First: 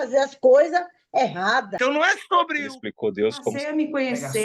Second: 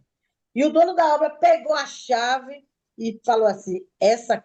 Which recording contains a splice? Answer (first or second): first